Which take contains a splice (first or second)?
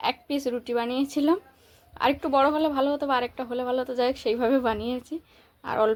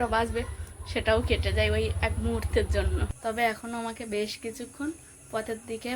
second